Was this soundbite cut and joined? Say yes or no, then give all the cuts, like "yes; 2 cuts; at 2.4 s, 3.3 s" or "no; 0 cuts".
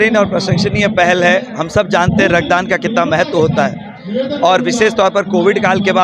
no; 0 cuts